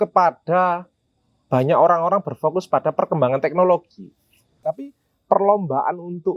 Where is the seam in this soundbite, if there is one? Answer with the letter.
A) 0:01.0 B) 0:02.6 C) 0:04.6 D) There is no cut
C